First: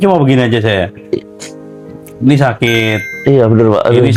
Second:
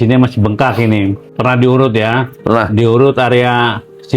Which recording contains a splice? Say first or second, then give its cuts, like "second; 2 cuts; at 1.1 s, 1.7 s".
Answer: second; 1 cut; at 1.2 s